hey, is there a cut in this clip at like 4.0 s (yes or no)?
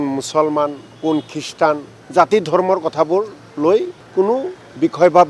yes